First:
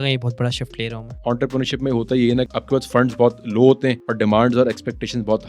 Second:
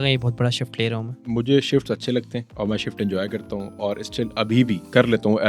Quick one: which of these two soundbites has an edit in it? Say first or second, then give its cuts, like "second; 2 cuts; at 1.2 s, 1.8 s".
first; 2 cuts; at 1.2 s, 4.0 s